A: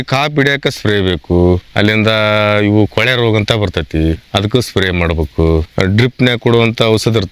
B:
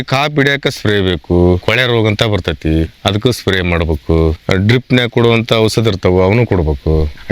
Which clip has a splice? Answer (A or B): B